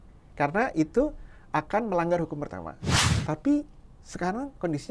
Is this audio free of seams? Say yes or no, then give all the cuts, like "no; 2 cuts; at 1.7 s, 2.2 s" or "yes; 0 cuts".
no; 1 cut; at 3.0 s